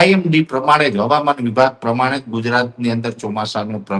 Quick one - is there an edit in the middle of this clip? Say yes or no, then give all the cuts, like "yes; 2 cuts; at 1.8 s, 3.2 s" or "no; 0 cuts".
no; 0 cuts